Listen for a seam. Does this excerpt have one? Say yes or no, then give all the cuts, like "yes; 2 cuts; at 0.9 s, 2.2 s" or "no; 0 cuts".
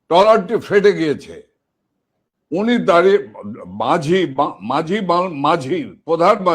no; 0 cuts